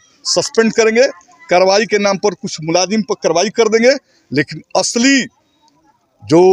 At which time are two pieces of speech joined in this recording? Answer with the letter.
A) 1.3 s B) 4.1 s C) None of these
C